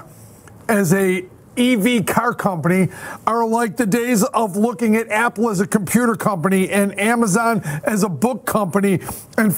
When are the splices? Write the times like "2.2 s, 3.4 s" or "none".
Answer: none